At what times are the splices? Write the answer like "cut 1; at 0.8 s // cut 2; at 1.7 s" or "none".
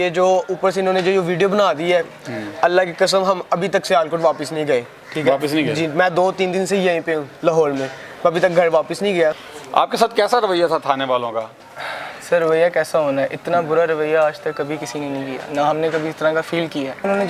none